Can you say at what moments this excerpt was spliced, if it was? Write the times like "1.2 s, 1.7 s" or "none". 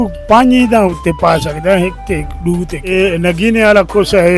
2.9 s